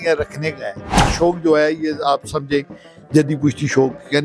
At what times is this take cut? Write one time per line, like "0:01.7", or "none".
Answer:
0:01.0